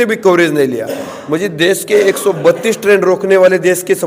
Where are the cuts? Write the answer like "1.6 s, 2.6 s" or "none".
none